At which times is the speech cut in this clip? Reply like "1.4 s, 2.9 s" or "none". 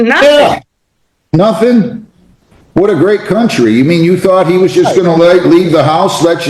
none